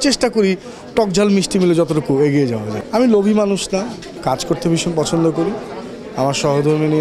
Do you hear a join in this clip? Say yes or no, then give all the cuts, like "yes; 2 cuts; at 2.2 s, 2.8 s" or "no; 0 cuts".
yes; 2 cuts; at 2.8 s, 4.0 s